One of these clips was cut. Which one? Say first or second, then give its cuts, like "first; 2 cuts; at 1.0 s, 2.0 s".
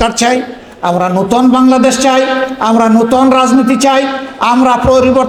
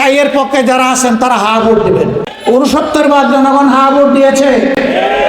second; 1 cut; at 2.3 s